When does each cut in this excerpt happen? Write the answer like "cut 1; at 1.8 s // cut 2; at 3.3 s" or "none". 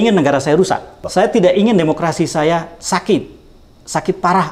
cut 1; at 1.0 s